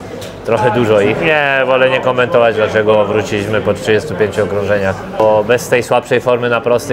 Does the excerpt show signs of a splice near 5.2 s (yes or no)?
yes